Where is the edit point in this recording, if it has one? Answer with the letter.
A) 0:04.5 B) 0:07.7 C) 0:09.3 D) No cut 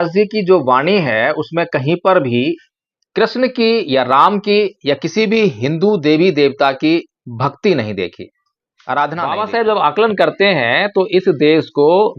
C